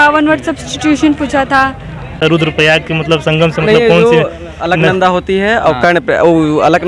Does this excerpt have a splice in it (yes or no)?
yes